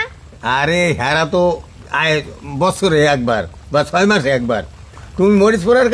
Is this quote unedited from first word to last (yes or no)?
no